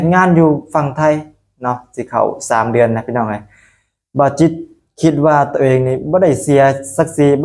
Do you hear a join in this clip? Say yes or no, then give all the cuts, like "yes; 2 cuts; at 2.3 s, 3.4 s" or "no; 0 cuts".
no; 0 cuts